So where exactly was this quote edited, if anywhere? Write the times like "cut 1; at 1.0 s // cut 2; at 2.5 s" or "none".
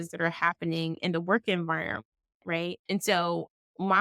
cut 1; at 2.8 s